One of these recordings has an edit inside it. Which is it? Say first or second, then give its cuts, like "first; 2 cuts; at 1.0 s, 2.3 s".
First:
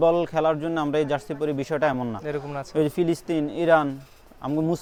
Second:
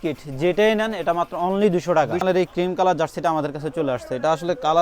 second; 1 cut; at 2.2 s